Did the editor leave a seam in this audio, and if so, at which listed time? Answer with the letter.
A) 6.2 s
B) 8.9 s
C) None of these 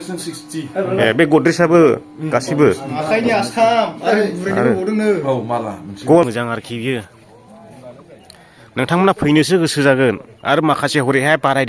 A